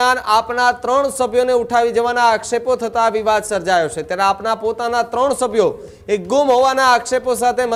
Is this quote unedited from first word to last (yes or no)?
yes